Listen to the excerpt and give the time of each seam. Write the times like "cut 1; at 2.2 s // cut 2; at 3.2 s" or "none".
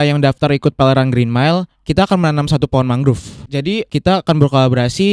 cut 1; at 3.7 s